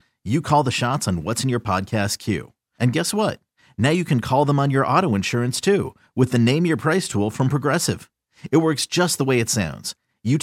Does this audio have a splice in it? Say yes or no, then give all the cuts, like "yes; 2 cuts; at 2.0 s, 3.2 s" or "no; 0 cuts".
no; 0 cuts